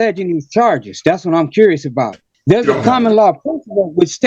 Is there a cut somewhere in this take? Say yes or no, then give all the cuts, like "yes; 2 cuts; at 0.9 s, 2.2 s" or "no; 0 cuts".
yes; 1 cut; at 2.3 s